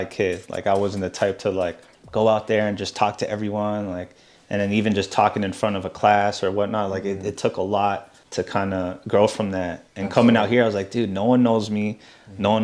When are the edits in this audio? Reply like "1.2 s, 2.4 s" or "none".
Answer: none

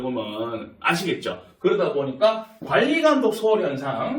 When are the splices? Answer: none

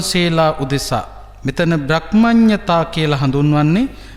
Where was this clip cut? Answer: none

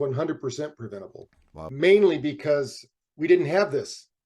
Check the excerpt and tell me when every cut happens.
1.7 s

